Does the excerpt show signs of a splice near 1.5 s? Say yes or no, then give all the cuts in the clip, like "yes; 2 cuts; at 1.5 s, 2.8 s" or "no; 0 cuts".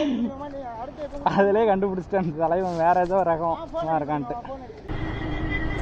no; 1 cut; at 4.9 s